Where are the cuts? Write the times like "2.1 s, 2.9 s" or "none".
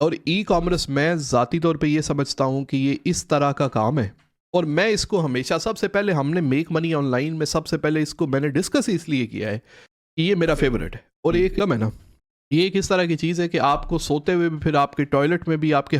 11.6 s